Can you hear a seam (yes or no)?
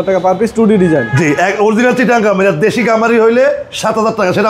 no